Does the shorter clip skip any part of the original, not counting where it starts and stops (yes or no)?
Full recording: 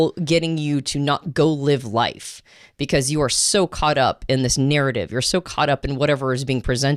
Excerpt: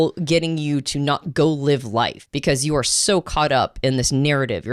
yes